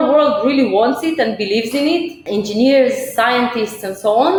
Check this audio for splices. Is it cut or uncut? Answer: uncut